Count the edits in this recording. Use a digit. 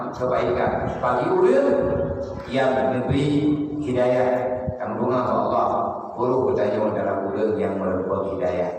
0